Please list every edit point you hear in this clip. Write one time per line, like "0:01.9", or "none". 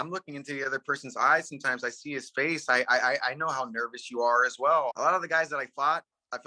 0:04.9